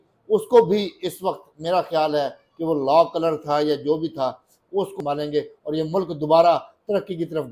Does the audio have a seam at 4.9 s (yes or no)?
yes